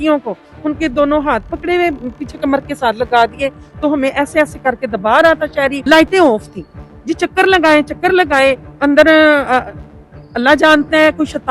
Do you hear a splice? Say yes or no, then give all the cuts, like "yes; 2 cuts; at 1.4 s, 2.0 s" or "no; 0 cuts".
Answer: yes; 2 cuts; at 5.8 s, 8.7 s